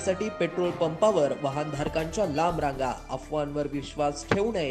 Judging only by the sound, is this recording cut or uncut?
uncut